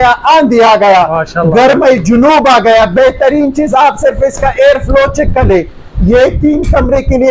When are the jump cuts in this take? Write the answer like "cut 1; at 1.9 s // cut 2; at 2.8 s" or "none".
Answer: none